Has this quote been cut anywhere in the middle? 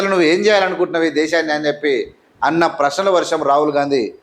no; 0 cuts

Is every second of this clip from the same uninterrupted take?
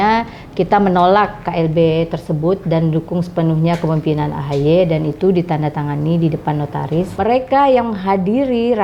no; 1 cut; at 7.1 s

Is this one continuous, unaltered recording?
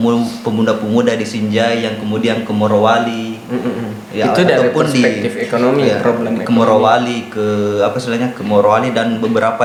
yes; 0 cuts

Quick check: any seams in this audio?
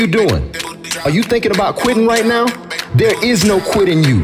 no; 0 cuts

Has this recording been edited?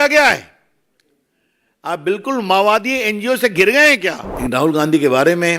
yes; 1 cut; at 4.3 s

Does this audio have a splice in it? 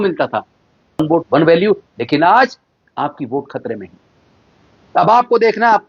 yes; 1 cut; at 1.0 s

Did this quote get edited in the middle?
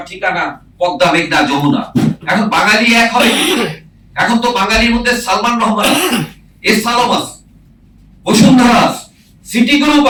no; 0 cuts

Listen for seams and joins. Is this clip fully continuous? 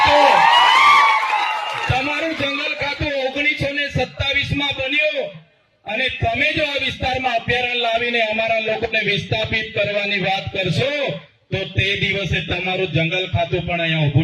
yes; 0 cuts

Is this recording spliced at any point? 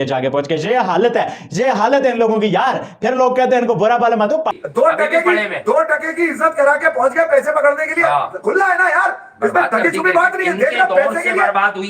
yes; 1 cut; at 4.5 s

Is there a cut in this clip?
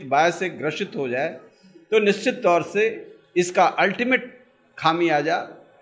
no; 0 cuts

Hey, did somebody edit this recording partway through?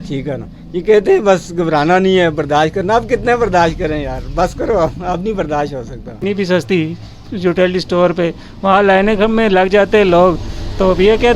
yes; 1 cut; at 6.2 s

